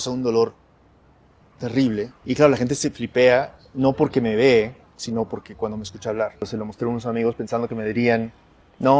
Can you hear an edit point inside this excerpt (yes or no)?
yes